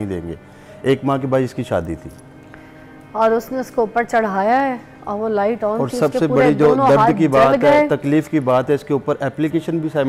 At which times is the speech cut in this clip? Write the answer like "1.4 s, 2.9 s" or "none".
none